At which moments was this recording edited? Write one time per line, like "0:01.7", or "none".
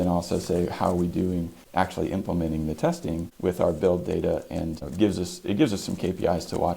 0:01.6
0:03.3
0:04.8